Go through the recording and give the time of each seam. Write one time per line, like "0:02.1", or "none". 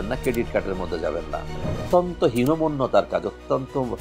0:01.7